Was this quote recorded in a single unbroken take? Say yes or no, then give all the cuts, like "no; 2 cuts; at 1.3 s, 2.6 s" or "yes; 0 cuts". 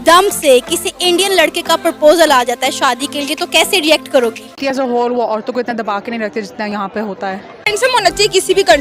no; 2 cuts; at 4.6 s, 7.5 s